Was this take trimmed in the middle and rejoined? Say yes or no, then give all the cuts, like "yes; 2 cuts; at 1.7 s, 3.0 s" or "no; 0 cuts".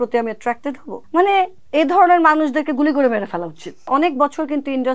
yes; 3 cuts; at 0.9 s, 1.6 s, 3.9 s